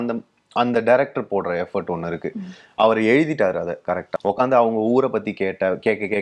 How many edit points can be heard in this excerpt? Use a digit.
1